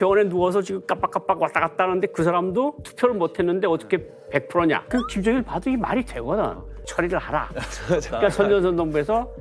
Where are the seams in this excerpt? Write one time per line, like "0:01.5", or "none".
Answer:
0:04.8
0:06.8